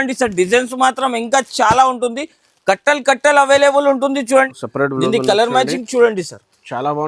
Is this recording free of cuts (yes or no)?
no